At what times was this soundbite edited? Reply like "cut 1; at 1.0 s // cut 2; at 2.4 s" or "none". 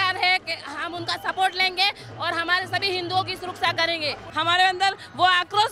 cut 1; at 4.2 s